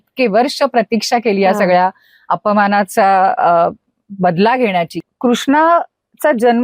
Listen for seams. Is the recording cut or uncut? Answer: cut